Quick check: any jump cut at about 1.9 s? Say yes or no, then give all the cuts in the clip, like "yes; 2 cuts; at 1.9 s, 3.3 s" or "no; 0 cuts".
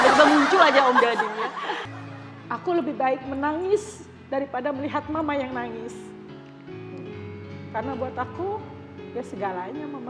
yes; 1 cut; at 1.9 s